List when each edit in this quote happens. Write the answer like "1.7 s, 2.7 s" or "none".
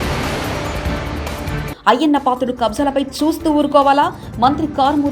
1.5 s